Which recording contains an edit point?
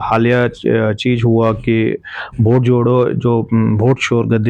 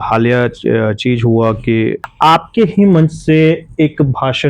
second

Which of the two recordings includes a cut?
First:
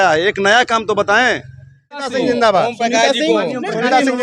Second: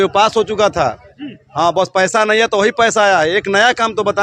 first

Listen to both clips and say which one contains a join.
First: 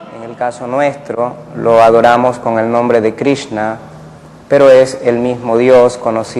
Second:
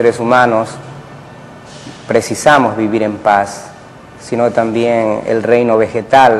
second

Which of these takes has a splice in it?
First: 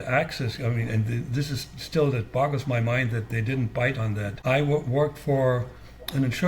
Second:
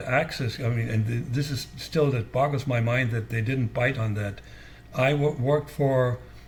first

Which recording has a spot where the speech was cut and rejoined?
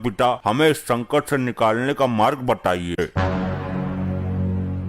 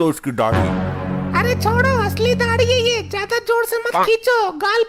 first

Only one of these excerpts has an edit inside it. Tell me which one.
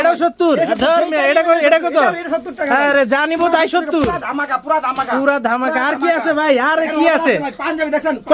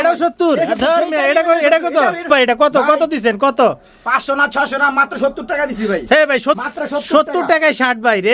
second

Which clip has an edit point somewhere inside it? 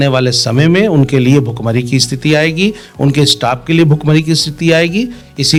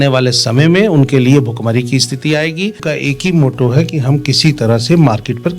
second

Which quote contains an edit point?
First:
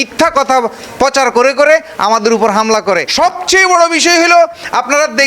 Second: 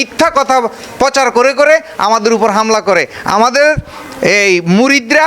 first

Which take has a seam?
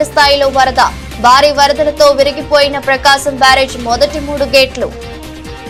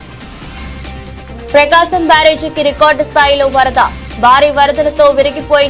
second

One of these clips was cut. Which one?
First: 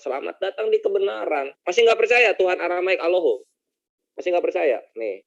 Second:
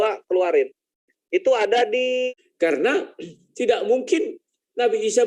second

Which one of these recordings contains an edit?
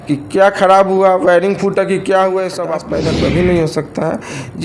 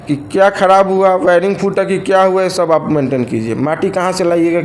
first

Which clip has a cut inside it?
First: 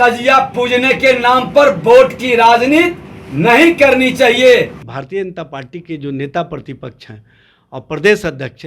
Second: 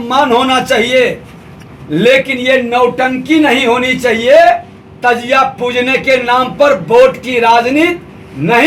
first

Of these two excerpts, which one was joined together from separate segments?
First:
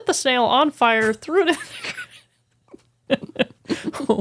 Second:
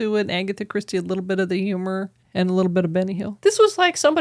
second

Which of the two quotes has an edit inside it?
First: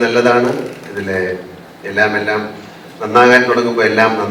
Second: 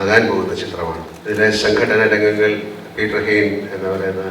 second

